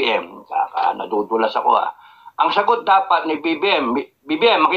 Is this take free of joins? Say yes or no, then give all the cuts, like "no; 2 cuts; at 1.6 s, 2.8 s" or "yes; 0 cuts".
yes; 0 cuts